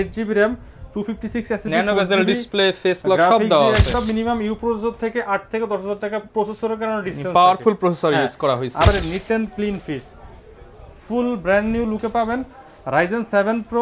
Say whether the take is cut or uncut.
cut